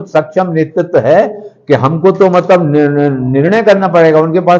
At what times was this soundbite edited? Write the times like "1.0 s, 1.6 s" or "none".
none